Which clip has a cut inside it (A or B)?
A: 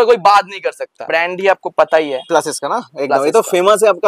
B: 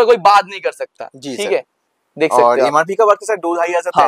A